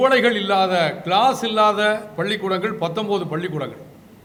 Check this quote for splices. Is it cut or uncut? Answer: uncut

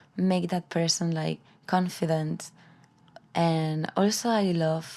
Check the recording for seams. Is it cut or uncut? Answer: uncut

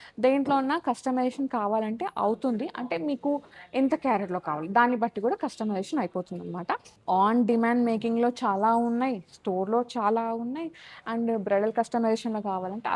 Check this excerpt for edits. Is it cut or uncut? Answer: cut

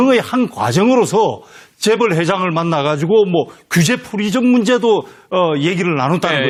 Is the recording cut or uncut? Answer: uncut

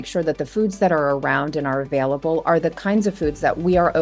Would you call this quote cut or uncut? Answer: uncut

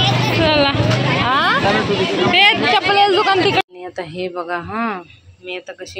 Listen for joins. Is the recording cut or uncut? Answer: cut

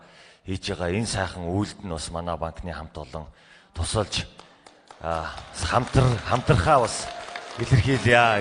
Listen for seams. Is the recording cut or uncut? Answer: uncut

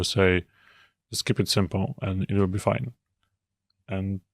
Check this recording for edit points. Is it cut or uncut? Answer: uncut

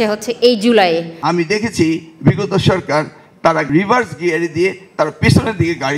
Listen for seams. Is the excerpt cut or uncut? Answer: cut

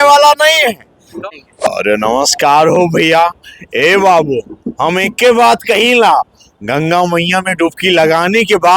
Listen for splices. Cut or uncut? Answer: cut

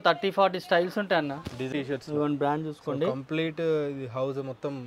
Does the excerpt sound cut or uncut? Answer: cut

